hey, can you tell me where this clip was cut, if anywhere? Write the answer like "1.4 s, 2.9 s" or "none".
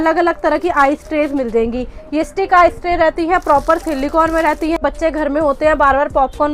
4.8 s